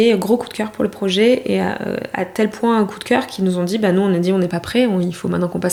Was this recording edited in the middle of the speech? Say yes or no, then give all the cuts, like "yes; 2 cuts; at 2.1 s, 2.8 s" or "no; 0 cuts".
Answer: no; 0 cuts